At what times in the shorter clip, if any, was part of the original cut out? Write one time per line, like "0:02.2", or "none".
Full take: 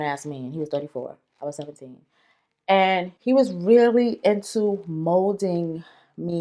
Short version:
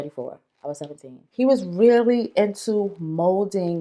0:01.3